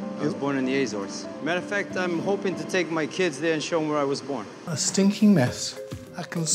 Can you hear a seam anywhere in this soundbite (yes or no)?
yes